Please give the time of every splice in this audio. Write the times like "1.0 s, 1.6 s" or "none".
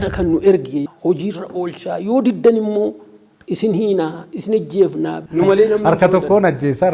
0.9 s, 5.2 s